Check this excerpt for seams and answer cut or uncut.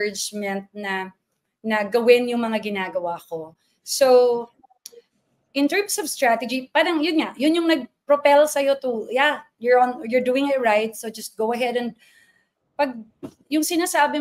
uncut